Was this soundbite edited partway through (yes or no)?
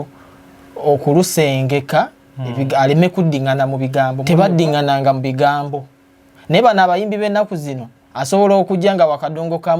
yes